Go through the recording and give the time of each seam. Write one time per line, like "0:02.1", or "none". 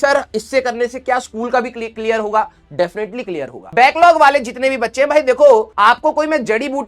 0:03.6